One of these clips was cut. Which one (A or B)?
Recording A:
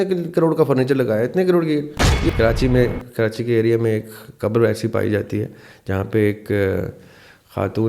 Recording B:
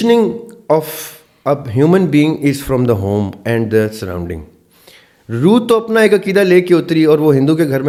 A